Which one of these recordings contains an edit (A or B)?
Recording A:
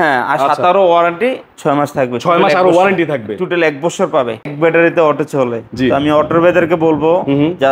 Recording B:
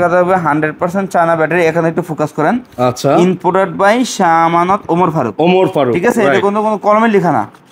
A